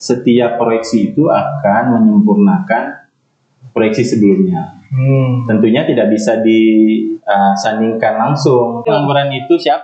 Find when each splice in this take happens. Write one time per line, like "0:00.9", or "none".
0:08.8